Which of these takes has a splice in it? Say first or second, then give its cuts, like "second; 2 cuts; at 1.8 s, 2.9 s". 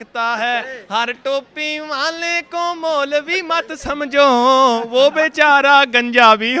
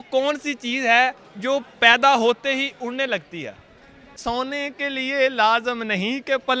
second; 1 cut; at 4.2 s